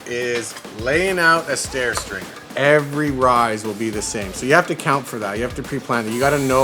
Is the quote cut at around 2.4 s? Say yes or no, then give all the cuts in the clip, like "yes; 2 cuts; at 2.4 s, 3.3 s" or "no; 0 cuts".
yes; 1 cut; at 2.4 s